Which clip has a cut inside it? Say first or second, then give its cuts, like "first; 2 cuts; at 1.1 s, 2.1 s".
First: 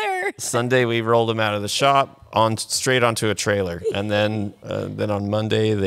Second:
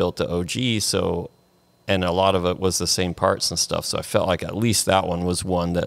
first; 1 cut; at 4.6 s